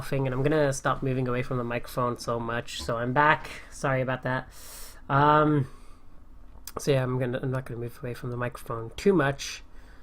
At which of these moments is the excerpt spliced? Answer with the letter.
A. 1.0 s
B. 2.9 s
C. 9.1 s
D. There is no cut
C